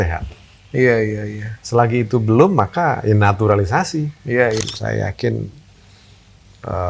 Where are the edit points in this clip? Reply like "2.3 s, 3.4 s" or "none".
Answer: 4.6 s